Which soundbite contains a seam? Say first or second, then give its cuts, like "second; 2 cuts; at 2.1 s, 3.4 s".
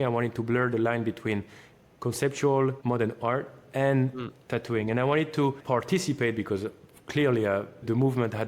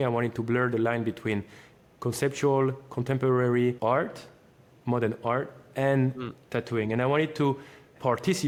first; 2 cuts; at 2.8 s, 5.6 s